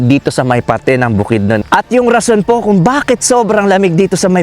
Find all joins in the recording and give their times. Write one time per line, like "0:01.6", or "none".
0:01.6